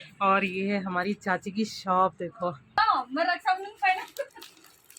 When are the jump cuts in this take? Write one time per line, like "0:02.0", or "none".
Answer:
0:02.8